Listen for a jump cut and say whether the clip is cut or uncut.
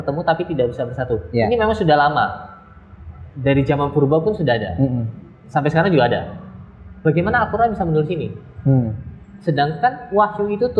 uncut